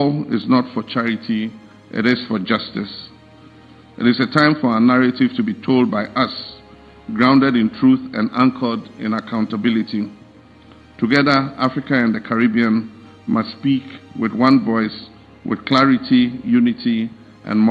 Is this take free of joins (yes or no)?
yes